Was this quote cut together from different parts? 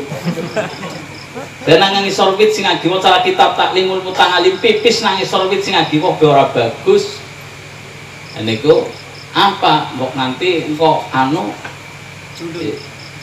no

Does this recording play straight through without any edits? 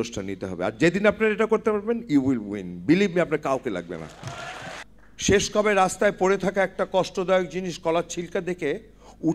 no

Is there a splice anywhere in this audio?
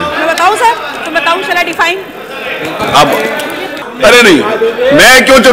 yes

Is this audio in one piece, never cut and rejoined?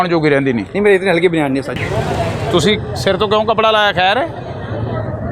no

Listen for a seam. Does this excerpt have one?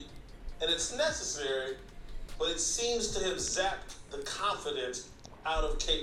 no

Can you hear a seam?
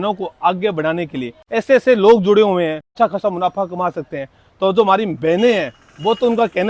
yes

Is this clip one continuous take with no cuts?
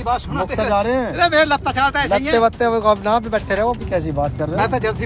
no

